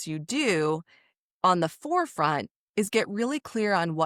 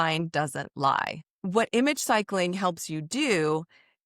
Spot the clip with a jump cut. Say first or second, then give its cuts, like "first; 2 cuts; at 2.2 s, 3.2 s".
second; 1 cut; at 1.3 s